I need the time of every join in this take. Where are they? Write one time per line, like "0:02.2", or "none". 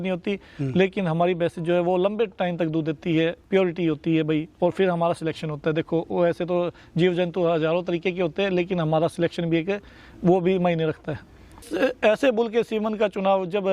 0:11.7